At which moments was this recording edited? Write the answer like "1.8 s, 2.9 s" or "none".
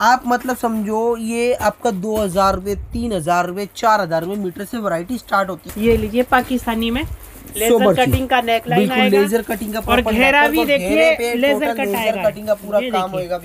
5.6 s